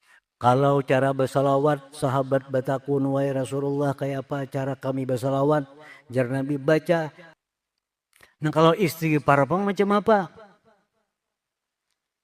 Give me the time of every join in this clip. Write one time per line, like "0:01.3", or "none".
0:07.2